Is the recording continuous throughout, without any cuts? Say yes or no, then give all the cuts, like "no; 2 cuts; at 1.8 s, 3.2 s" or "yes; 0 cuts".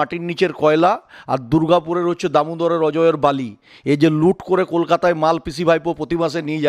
yes; 0 cuts